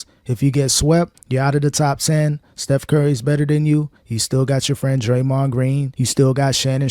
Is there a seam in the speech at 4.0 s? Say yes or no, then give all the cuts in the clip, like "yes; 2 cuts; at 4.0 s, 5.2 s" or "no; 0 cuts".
no; 1 cut; at 5.9 s